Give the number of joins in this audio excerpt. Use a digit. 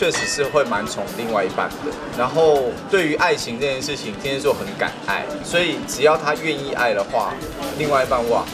0